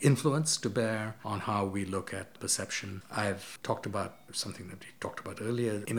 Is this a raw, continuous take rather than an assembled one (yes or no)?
yes